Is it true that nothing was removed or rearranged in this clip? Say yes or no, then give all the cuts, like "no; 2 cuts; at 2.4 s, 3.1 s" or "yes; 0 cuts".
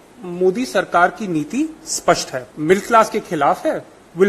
no; 1 cut; at 2.5 s